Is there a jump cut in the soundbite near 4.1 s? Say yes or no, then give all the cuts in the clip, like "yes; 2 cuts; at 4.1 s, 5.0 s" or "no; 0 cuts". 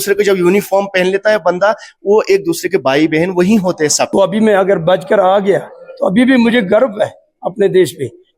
yes; 1 cut; at 4.1 s